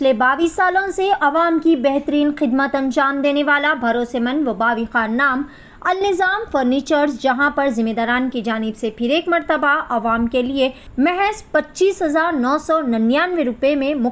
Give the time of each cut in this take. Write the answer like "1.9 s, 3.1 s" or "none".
10.8 s